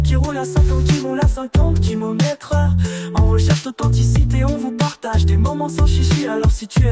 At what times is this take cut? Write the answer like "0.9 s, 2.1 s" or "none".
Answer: none